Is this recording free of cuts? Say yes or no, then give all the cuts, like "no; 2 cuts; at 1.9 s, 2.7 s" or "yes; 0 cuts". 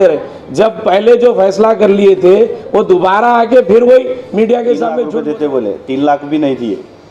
no; 1 cut; at 5.0 s